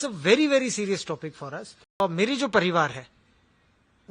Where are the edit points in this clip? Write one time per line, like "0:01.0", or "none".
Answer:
0:02.0